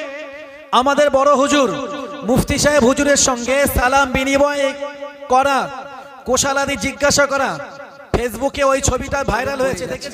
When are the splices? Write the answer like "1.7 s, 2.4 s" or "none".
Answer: none